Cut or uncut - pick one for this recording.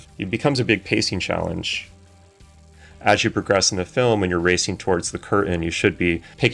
cut